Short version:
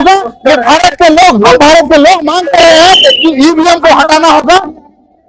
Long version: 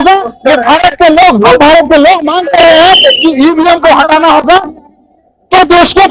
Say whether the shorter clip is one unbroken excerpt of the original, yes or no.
yes